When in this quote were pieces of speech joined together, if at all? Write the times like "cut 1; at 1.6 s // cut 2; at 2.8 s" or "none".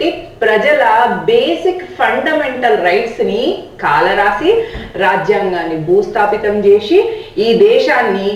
none